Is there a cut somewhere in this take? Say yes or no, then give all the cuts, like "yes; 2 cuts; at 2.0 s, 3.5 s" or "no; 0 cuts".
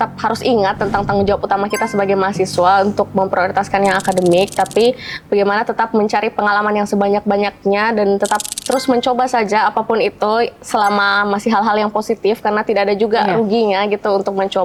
no; 0 cuts